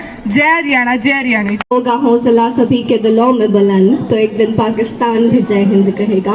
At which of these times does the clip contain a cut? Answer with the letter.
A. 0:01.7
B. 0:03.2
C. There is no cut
A